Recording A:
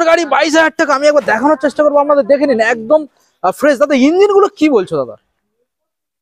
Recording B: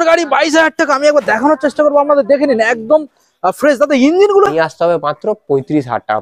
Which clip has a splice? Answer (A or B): B